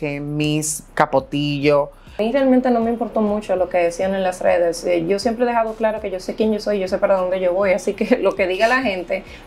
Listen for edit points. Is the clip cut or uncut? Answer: cut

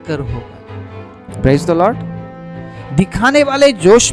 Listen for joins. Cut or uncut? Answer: uncut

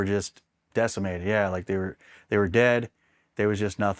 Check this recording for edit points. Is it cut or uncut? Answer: uncut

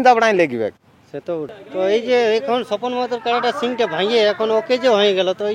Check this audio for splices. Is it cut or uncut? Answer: cut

